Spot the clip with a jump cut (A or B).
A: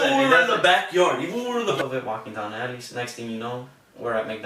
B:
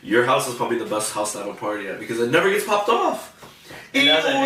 A